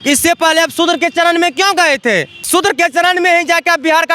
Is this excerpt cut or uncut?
cut